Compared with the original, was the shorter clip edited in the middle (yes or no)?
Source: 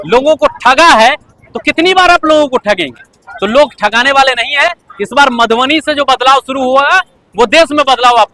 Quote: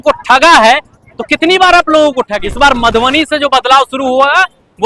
yes